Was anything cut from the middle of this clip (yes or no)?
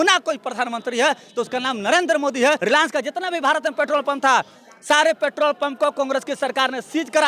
yes